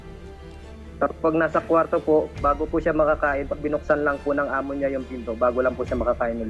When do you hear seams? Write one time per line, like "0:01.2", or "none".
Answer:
0:01.0